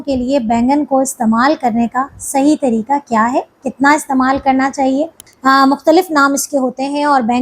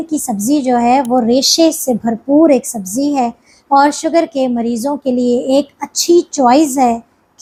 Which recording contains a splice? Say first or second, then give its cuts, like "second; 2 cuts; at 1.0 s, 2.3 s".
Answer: first; 1 cut; at 5.2 s